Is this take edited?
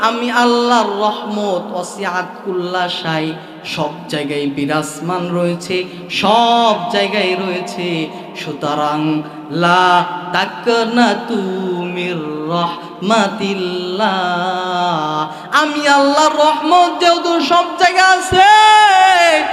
no; 0 cuts

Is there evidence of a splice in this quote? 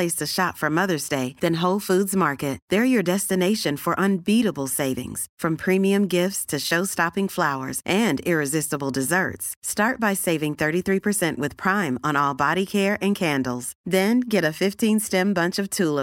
no; 0 cuts

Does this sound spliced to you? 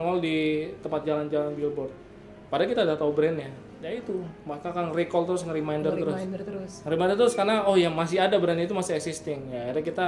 no; 0 cuts

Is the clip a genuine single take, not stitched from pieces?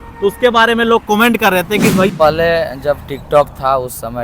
no; 1 cut; at 2.1 s

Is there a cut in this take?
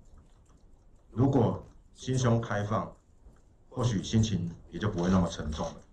no; 0 cuts

